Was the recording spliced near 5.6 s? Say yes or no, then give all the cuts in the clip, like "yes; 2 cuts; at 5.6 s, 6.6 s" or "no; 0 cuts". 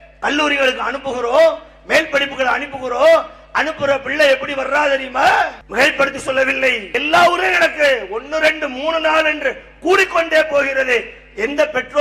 yes; 1 cut; at 5.6 s